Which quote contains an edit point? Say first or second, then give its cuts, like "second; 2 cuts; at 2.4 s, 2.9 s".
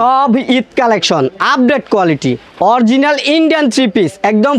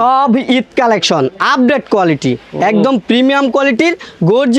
first; 1 cut; at 2.4 s